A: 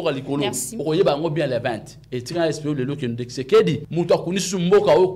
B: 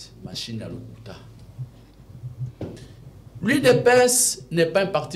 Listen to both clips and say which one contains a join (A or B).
A